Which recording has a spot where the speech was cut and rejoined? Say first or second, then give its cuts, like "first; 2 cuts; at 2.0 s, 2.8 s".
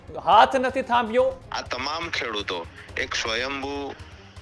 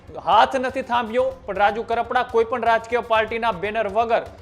first; 1 cut; at 1.4 s